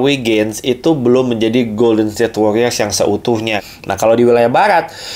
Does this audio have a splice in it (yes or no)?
yes